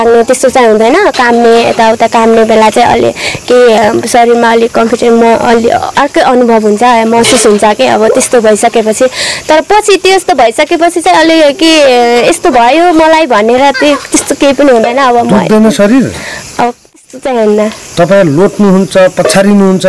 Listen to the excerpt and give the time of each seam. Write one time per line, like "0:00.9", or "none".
none